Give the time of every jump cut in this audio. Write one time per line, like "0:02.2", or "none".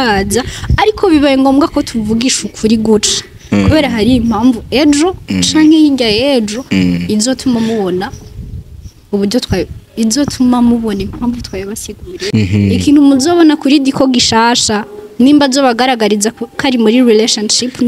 0:12.2